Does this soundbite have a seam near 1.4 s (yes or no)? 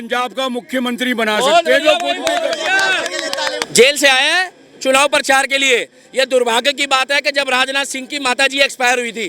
no